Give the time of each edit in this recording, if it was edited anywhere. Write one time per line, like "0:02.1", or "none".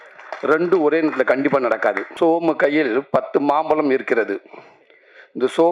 0:02.1